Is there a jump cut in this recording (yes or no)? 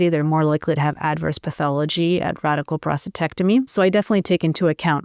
yes